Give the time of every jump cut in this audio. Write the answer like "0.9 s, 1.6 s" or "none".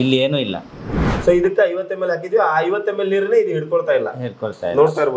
1.0 s